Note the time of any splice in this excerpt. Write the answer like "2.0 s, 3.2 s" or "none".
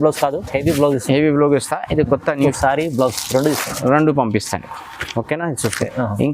2.5 s

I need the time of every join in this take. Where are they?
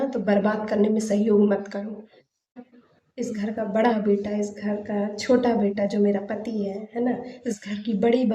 2.6 s

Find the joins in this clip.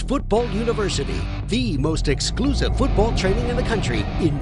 none

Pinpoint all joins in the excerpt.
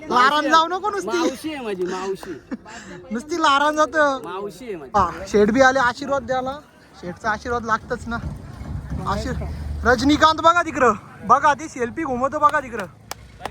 4.9 s

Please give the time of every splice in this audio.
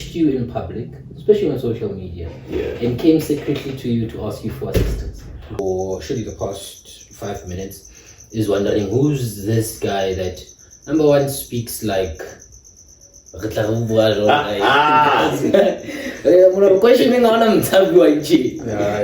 5.6 s

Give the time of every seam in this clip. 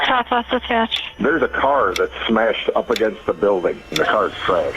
1.0 s, 3.9 s

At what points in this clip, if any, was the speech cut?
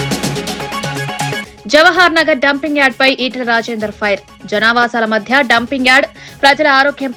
none

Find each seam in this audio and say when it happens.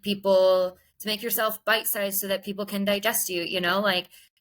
none

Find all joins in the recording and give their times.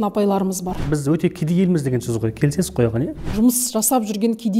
0.8 s, 3.1 s

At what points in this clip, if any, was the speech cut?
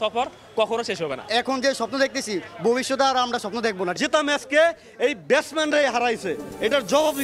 1.2 s, 4.0 s

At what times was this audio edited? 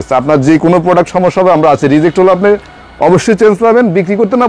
none

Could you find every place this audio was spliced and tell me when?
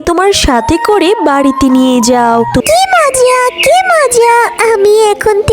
2.7 s

